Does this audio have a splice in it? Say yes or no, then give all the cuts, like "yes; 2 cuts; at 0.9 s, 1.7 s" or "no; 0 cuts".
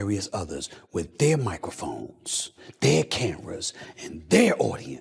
no; 0 cuts